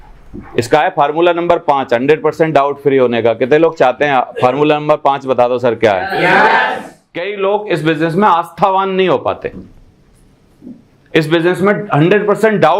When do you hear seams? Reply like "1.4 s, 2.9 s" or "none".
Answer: 7.3 s